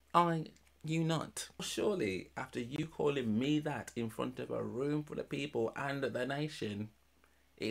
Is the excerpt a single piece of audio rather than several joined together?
no; 1 cut; at 1.7 s

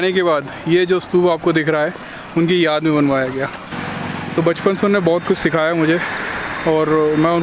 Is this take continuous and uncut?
yes; 0 cuts

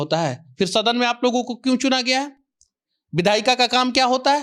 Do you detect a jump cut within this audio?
no; 0 cuts

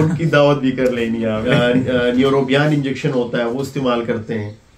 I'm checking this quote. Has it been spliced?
yes; 1 cut; at 1.5 s

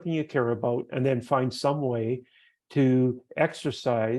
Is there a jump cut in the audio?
no; 0 cuts

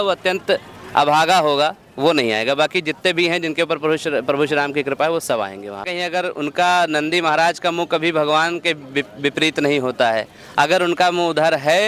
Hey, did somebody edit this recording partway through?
yes; 1 cut; at 5.9 s

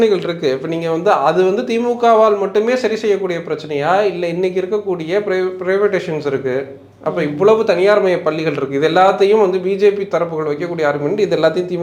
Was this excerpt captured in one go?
yes; 0 cuts

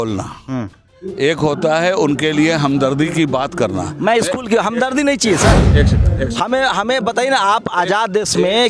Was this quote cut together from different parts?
no; 0 cuts

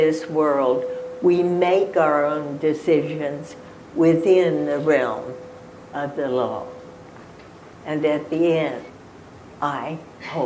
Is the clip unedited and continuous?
no; 1 cut; at 9.0 s

